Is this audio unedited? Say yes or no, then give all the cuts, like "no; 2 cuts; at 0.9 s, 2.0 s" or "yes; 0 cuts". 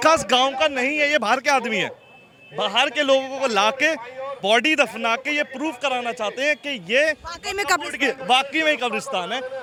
yes; 0 cuts